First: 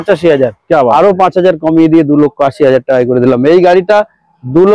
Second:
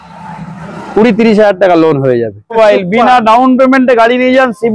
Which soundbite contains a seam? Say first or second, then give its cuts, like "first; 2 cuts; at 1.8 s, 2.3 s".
second; 1 cut; at 2.5 s